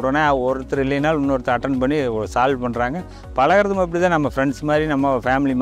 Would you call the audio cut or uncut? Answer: uncut